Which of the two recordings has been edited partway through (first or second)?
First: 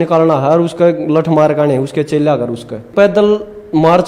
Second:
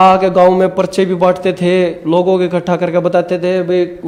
first